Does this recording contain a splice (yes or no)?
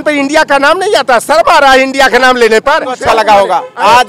yes